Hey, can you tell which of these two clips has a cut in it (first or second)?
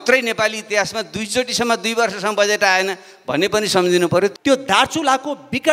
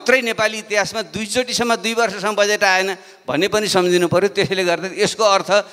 first